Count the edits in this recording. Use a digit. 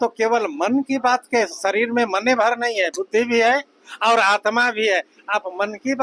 0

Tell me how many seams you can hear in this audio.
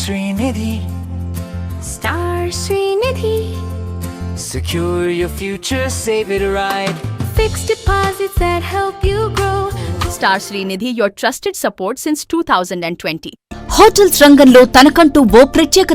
2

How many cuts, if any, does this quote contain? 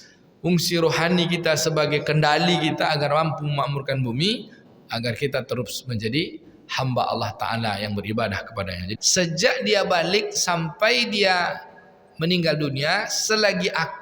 1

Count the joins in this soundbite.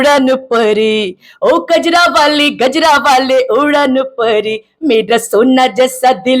0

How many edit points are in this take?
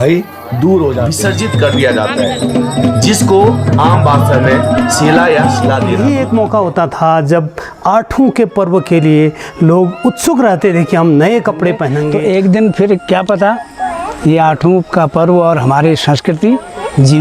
3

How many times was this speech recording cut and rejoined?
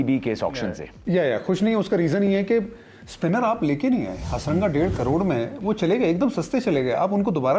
0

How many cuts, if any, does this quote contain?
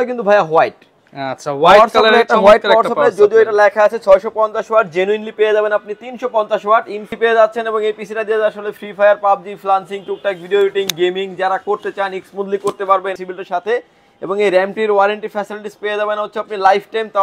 2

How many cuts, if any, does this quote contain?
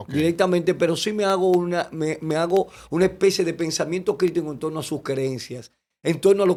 0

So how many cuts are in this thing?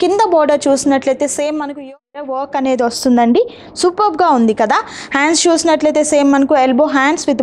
1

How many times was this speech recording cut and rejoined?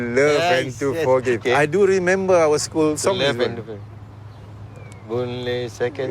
1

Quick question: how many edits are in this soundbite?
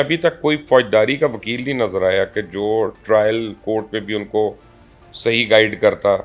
0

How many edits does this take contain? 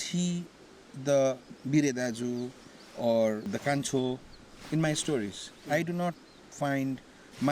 2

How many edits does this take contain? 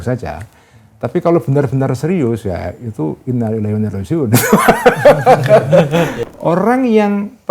1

